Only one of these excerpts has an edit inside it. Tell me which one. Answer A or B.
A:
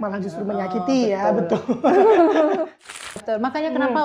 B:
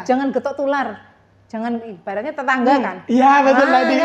A